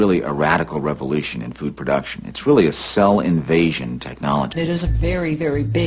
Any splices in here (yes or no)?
yes